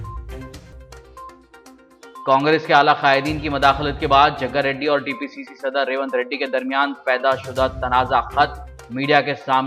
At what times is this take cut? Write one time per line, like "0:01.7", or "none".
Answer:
none